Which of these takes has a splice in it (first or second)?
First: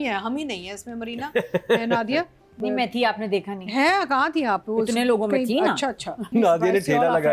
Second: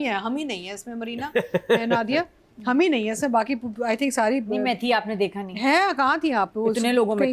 first